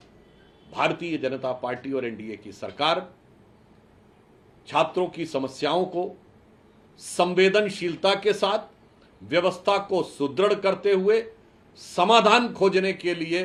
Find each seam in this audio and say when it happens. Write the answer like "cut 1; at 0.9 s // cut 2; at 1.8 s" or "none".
none